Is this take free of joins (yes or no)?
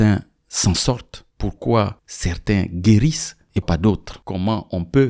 no